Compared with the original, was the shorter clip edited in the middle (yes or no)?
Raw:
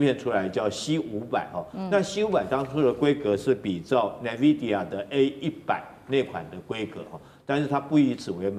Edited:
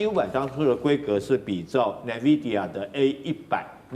no